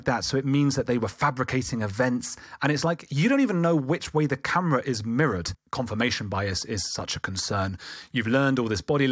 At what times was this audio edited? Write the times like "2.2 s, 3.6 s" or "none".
5.6 s